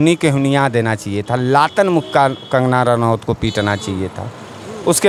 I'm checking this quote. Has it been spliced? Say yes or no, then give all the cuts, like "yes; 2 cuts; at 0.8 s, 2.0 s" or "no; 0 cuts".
no; 0 cuts